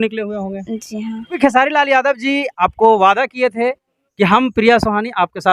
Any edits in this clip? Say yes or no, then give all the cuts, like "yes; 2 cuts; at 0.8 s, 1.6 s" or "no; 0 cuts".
yes; 1 cut; at 1.4 s